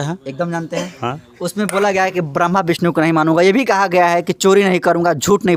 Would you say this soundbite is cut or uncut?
uncut